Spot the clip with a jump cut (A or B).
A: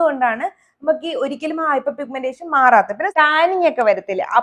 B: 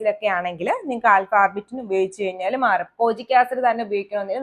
A